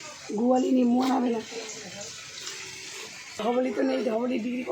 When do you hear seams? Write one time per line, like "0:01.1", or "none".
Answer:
0:03.4